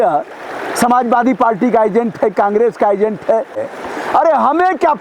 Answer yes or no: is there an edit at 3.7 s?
yes